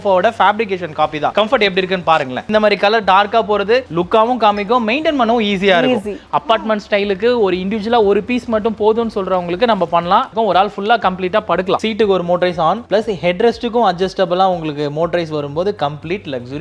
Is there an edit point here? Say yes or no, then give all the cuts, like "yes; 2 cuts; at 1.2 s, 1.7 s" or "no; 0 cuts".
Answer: yes; 4 cuts; at 2.5 s, 6.2 s, 10.3 s, 11.8 s